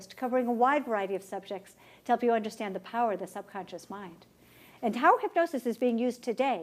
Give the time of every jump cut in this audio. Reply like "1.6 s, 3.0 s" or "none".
3.2 s